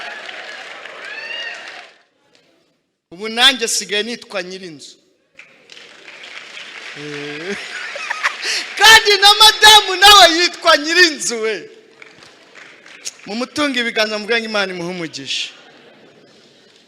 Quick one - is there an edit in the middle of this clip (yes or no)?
yes